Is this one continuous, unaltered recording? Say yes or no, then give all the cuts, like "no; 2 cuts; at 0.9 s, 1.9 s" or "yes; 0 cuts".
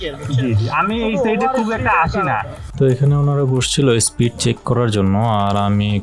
no; 1 cut; at 2.6 s